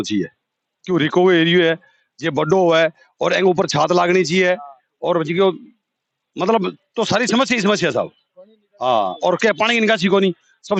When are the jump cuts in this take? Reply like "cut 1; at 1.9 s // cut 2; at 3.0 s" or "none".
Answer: none